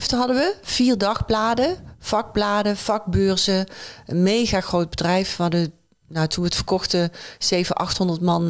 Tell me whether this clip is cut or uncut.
uncut